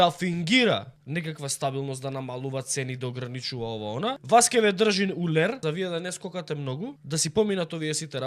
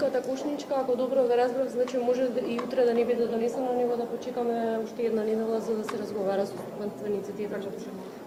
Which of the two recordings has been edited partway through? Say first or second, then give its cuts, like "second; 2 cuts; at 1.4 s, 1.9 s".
first; 4 cuts; at 1.0 s, 4.2 s, 5.6 s, 7.0 s